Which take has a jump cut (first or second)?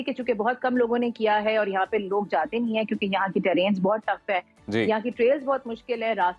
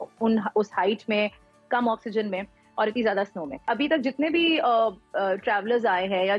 second